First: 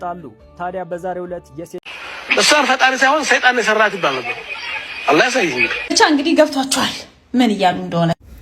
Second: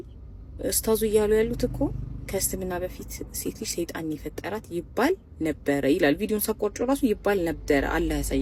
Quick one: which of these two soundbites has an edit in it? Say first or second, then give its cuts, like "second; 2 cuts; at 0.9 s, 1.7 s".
first; 1 cut; at 1.9 s